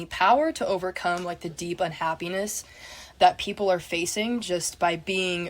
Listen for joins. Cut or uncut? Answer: cut